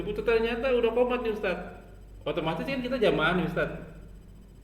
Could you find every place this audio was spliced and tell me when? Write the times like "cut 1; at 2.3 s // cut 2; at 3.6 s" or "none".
none